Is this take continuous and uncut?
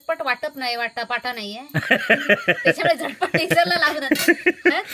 yes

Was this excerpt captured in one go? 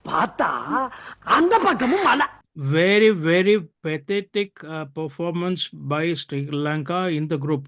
no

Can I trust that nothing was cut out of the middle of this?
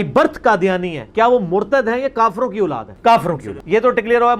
yes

